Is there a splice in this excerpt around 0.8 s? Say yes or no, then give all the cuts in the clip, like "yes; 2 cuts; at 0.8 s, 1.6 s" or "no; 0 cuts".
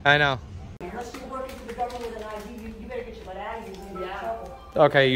yes; 2 cuts; at 0.8 s, 3.7 s